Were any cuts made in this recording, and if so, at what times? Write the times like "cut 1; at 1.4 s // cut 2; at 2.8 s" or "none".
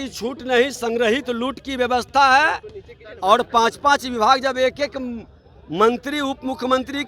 none